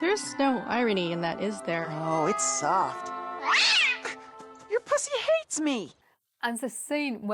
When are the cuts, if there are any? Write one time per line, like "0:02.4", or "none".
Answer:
none